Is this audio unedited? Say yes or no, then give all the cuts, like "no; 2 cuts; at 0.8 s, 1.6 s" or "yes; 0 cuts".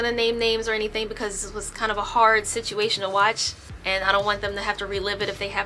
yes; 0 cuts